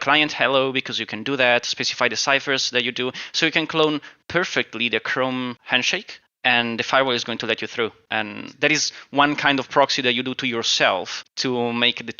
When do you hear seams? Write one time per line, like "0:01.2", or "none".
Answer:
0:05.7
0:08.0
0:11.2